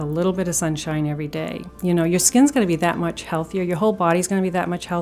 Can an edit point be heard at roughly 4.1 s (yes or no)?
no